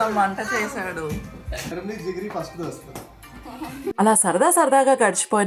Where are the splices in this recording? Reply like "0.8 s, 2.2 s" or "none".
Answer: none